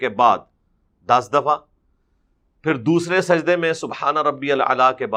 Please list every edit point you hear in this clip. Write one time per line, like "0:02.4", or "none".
none